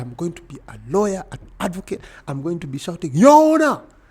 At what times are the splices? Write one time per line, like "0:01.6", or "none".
none

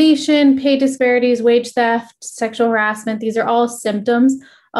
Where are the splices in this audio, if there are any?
0:01.0

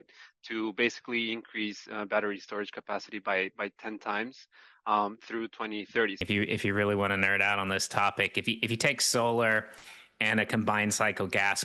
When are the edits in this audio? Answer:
0:06.2

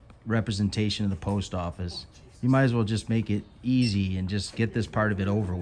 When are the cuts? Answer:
none

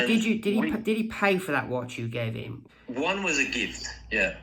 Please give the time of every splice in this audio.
0:02.6

